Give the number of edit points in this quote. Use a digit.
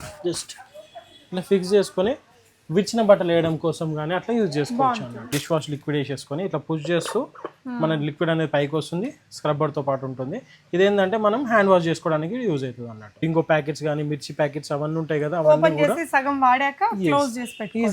2